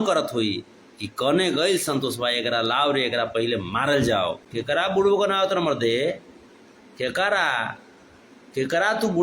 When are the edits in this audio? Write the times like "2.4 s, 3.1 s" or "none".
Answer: 4.5 s